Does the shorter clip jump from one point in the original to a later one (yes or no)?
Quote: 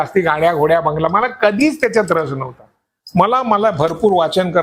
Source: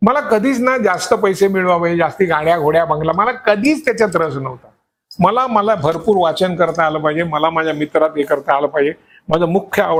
no